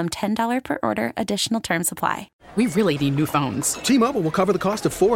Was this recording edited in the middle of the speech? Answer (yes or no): yes